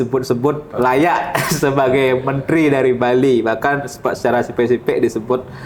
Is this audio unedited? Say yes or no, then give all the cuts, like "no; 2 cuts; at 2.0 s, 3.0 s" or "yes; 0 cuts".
yes; 0 cuts